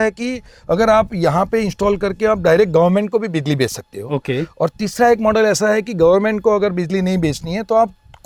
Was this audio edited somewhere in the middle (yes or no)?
no